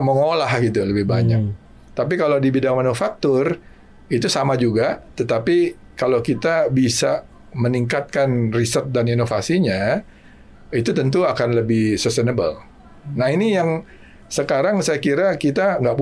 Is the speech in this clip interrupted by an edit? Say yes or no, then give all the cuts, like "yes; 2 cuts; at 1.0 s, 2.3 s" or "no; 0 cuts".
no; 0 cuts